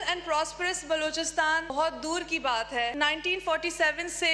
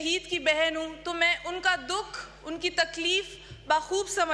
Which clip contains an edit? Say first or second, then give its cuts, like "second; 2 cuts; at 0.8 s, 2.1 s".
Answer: first; 2 cuts; at 1.7 s, 2.9 s